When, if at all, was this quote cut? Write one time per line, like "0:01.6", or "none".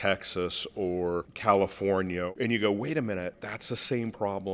0:01.3
0:02.3
0:03.3

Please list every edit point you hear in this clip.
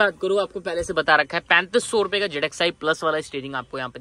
none

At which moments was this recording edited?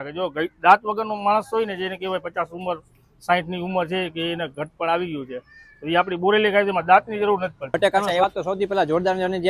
0:07.8

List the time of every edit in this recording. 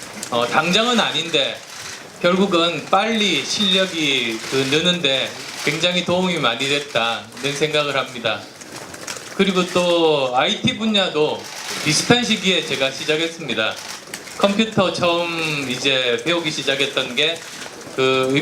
0:10.3

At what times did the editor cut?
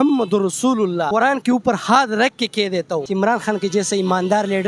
0:01.1
0:03.1

